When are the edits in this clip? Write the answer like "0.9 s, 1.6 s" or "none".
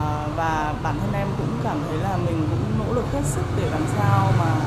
1.3 s